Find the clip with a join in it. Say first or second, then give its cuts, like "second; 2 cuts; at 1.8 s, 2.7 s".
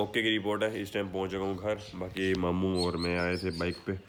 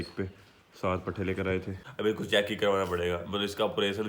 second; 1 cut; at 1.8 s